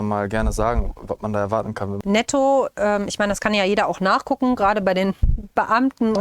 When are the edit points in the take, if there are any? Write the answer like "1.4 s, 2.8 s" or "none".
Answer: 1.9 s

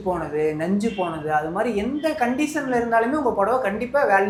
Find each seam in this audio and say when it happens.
none

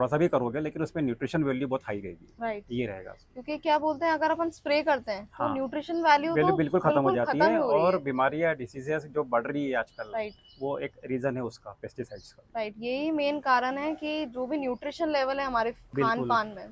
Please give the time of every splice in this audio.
none

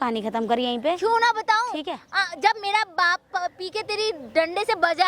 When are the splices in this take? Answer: none

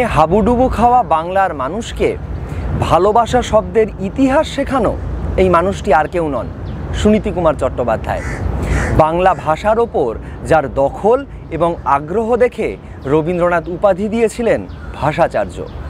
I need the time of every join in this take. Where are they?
none

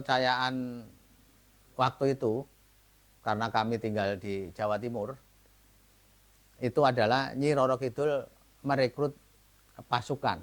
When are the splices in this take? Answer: none

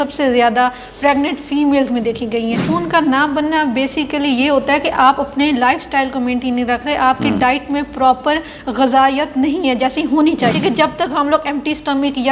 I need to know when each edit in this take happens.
2.6 s, 10.5 s

